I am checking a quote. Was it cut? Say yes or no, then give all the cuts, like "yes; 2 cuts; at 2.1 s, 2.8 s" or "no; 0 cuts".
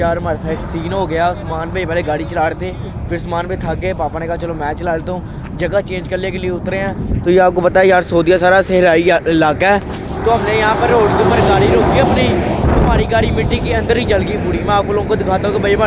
no; 0 cuts